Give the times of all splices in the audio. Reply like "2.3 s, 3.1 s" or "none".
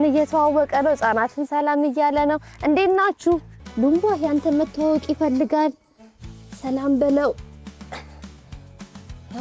3.6 s